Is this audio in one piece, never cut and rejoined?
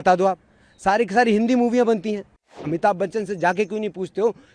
no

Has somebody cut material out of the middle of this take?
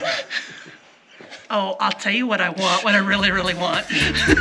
yes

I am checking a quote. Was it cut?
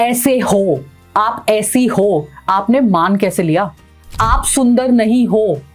no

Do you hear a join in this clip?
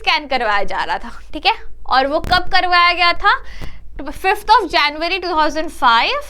no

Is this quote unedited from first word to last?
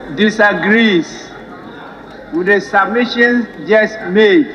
yes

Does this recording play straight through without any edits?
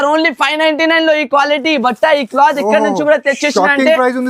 yes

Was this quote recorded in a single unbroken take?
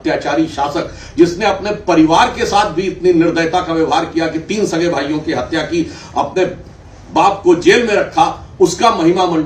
yes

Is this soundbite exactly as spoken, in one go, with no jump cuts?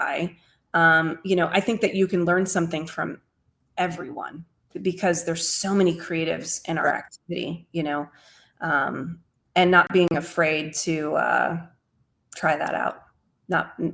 yes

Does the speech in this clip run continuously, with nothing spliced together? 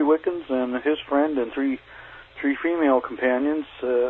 yes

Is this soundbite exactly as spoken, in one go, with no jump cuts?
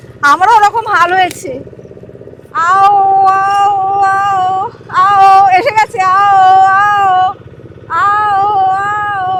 yes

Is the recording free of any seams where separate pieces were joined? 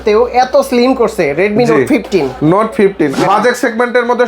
no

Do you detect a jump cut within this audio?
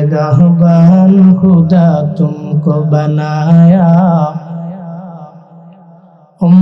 no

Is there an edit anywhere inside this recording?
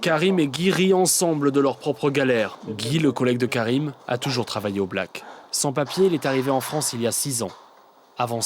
yes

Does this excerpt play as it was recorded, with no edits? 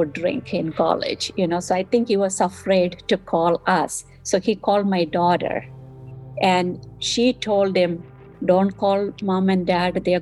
yes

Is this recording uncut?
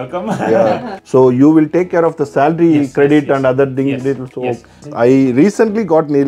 no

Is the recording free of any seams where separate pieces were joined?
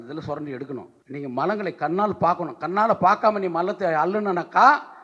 no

